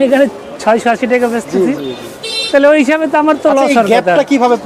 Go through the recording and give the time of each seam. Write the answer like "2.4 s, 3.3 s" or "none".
none

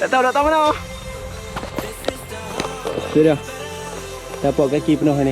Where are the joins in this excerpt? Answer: 1.4 s

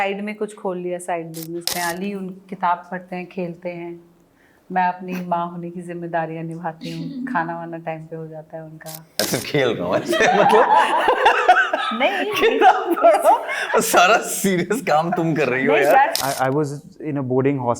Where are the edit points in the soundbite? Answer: 1.7 s, 9.2 s, 16.1 s

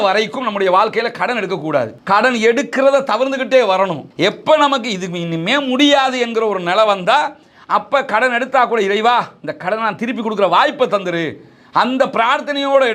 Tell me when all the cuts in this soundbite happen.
none

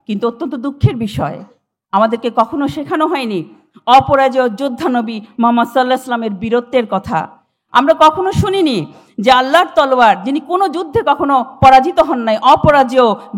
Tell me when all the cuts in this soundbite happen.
none

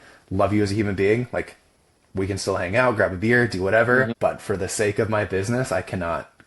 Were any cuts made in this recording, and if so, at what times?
4.1 s

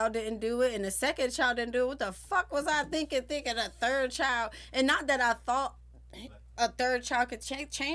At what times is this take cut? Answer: none

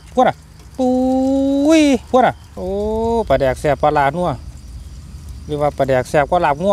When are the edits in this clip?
2.5 s

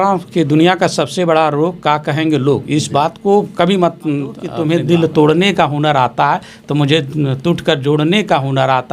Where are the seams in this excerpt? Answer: 4.4 s

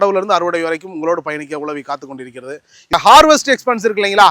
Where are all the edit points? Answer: 2.9 s

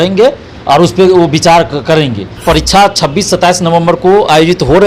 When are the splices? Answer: 2.3 s

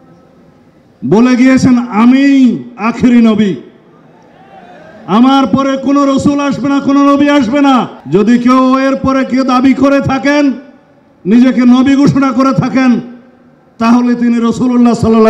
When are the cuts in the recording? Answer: 8.0 s

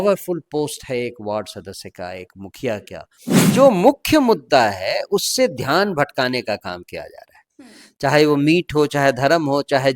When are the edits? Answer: 3.5 s

